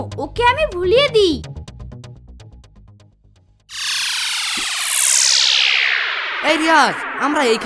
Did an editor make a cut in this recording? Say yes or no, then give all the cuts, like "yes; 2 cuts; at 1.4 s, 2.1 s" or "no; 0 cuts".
no; 0 cuts